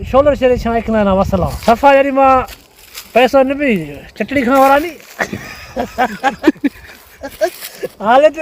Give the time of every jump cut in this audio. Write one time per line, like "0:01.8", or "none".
0:01.5